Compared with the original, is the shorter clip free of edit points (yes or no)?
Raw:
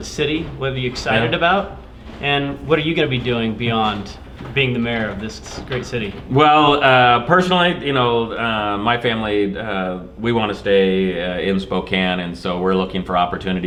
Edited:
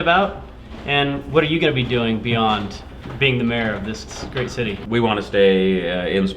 no